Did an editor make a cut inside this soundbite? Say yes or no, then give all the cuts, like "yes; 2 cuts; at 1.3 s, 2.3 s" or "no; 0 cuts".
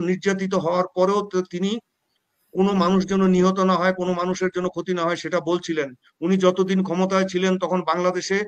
no; 0 cuts